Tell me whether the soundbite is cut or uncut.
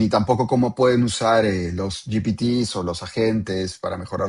uncut